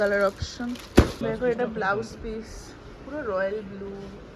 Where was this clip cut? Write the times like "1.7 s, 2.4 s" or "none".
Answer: 1.2 s